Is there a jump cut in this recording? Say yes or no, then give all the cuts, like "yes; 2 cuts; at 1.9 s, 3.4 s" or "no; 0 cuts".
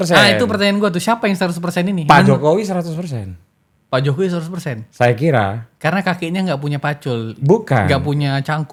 no; 0 cuts